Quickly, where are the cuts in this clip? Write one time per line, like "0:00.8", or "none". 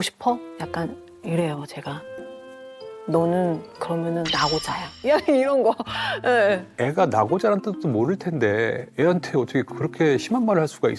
0:06.7